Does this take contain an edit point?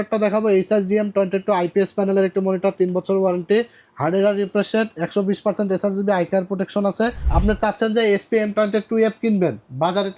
yes; 1 cut; at 7.2 s

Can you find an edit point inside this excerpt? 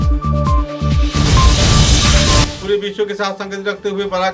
yes; 1 cut; at 2.6 s

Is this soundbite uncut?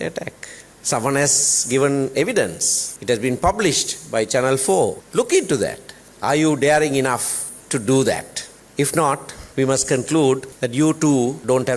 yes; 0 cuts

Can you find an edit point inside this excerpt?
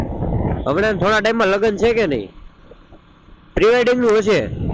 no; 0 cuts

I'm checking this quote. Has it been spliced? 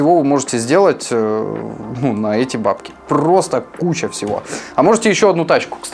no; 0 cuts

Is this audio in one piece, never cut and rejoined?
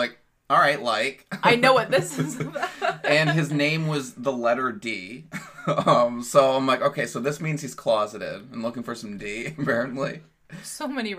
yes; 0 cuts

